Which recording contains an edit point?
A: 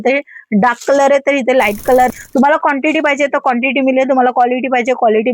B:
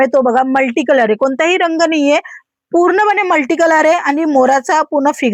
A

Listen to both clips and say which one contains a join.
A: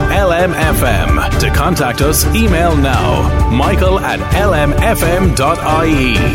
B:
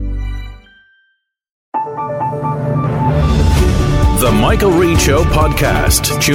B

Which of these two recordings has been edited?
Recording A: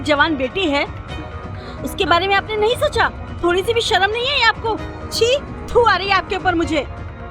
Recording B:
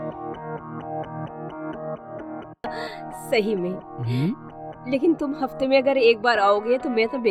A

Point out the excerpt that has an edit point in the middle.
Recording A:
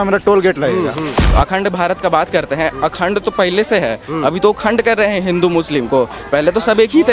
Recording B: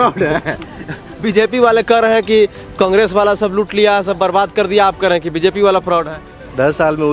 A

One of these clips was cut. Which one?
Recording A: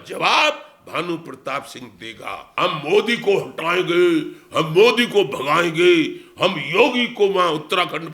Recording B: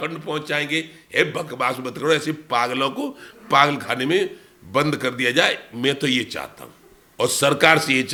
A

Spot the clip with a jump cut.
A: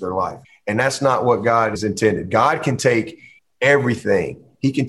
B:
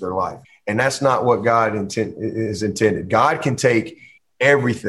A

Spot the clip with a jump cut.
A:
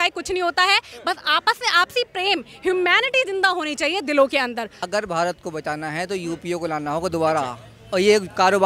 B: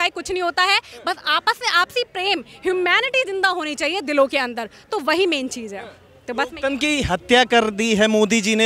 A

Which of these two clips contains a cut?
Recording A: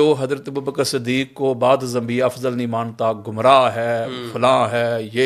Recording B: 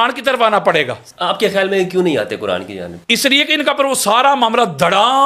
B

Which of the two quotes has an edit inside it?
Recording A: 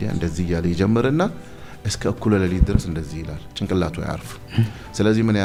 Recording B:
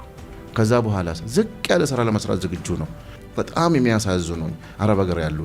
B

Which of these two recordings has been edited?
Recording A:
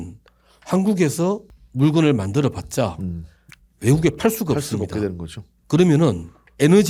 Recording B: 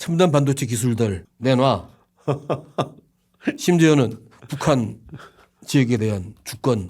B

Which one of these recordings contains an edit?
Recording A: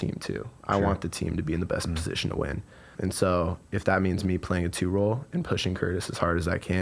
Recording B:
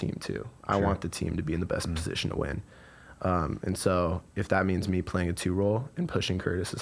A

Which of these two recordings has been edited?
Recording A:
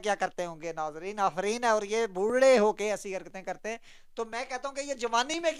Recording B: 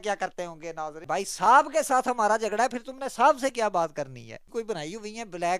B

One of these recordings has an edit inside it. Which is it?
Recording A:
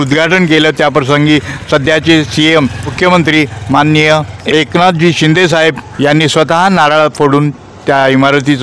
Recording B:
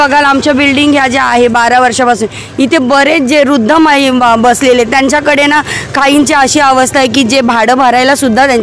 A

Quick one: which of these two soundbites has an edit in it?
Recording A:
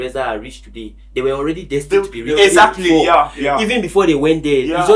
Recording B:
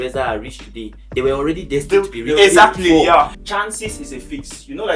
B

